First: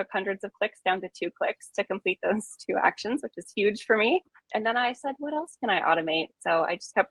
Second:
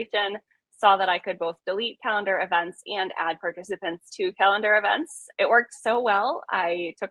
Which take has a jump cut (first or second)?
second